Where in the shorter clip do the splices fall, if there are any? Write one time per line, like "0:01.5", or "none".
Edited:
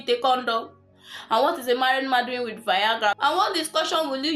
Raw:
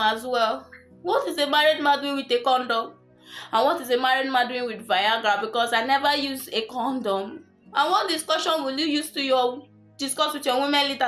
0:03.2